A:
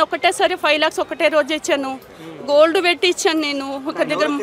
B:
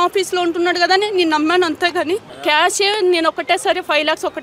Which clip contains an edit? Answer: B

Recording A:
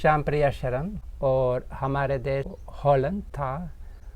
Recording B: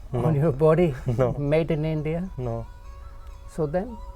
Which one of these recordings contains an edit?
A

